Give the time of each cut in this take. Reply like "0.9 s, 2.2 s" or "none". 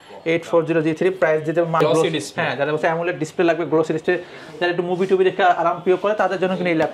1.8 s